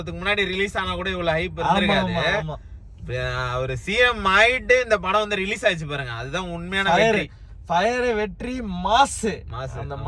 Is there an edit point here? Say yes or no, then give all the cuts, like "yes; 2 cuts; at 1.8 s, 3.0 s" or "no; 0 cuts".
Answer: no; 0 cuts